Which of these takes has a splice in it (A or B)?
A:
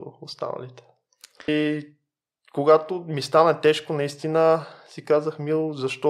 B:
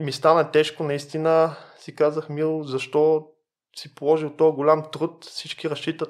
A